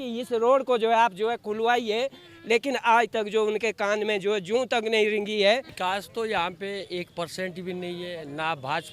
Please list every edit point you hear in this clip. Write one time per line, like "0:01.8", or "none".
0:05.7